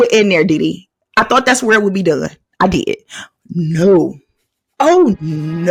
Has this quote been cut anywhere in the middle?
no; 0 cuts

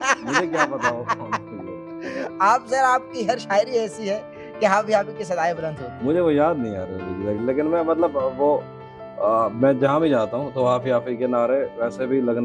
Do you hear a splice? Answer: no; 0 cuts

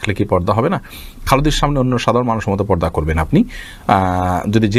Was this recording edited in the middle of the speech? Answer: no; 0 cuts

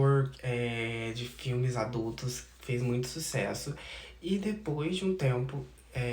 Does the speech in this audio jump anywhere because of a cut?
no; 0 cuts

